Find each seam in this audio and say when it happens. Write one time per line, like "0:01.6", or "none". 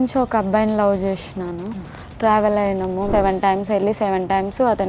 0:03.1